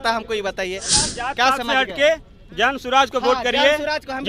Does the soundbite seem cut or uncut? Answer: cut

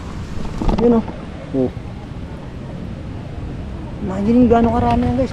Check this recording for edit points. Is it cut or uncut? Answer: uncut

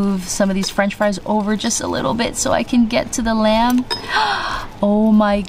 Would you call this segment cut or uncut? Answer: uncut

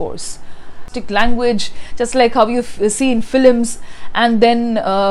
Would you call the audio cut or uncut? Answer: cut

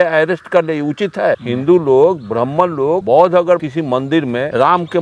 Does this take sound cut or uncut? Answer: cut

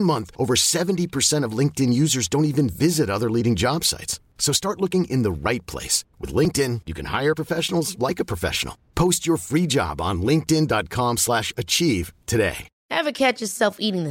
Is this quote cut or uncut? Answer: cut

